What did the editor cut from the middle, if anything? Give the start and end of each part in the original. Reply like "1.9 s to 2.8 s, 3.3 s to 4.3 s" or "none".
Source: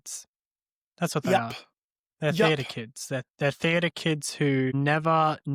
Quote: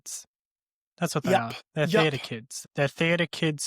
1.6 s to 2.0 s, 3.1 s to 3.3 s